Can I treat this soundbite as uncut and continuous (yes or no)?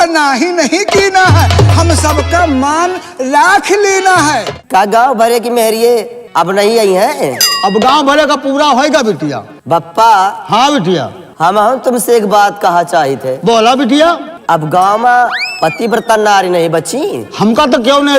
no